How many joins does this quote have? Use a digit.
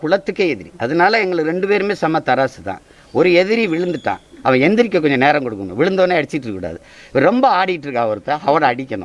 0